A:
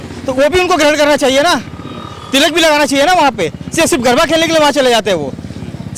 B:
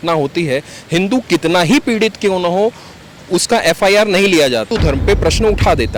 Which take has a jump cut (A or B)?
B